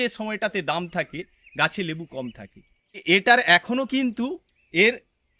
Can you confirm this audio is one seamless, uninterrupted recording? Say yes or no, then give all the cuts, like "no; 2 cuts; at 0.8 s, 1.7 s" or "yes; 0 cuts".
no; 1 cut; at 3.0 s